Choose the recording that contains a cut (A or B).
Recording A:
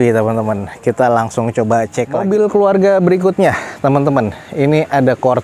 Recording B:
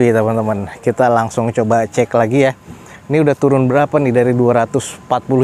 A